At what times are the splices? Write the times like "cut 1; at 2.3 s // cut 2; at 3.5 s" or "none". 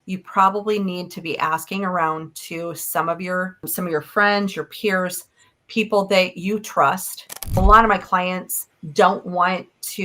cut 1; at 7.6 s